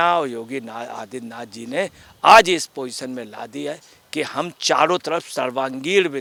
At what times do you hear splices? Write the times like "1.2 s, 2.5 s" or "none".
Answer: none

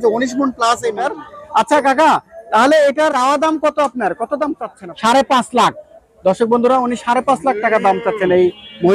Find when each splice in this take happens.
1.0 s, 3.1 s, 4.7 s

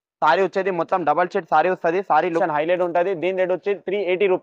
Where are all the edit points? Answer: 2.4 s

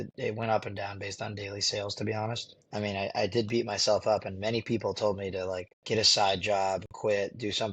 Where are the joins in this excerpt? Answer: 2.6 s

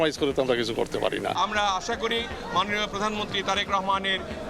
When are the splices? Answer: 1.3 s

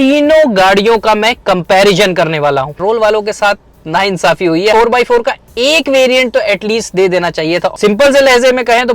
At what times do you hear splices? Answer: 2.7 s, 4.7 s, 7.8 s

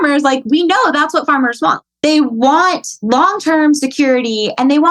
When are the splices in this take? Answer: 1.8 s, 2.9 s

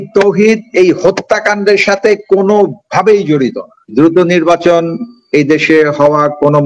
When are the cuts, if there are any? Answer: 3.9 s

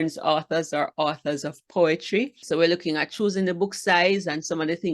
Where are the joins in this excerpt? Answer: 2.4 s

